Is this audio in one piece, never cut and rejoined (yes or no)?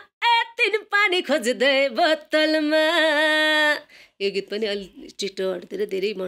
yes